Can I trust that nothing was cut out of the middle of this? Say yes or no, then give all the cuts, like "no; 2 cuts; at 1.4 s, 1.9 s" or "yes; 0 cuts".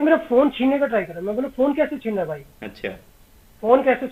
yes; 0 cuts